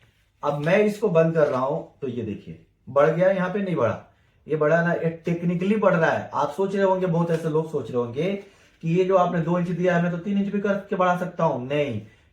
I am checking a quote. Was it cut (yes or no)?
no